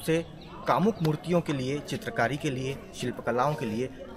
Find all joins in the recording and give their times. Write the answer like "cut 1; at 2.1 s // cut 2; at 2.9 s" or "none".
none